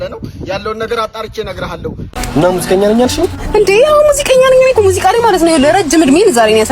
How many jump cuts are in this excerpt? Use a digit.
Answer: 1